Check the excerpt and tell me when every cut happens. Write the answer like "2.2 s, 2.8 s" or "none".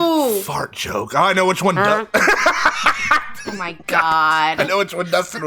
none